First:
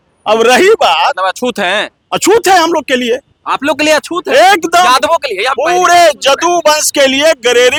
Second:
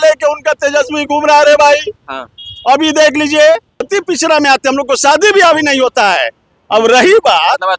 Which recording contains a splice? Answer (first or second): second